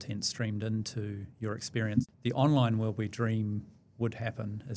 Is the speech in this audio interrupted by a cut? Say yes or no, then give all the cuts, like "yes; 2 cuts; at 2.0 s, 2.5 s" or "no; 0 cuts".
yes; 1 cut; at 2.0 s